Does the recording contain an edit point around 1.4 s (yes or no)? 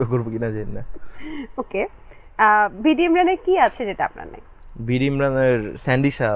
no